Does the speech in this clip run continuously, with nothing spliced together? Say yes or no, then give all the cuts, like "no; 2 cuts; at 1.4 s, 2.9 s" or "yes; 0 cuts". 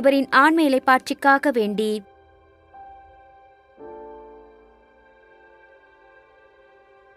no; 1 cut; at 2.1 s